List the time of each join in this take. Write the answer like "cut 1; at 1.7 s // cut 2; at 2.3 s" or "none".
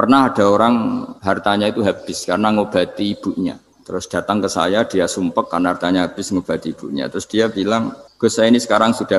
cut 1; at 1.1 s // cut 2; at 3.7 s // cut 3; at 8.0 s